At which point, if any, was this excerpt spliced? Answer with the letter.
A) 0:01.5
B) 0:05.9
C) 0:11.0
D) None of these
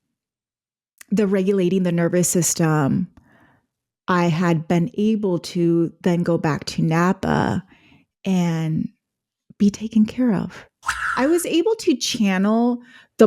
C